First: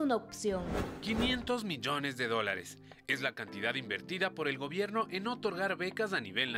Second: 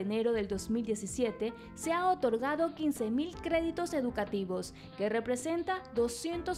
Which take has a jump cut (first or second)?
first